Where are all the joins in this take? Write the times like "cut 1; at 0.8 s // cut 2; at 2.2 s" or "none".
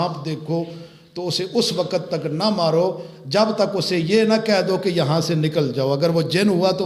none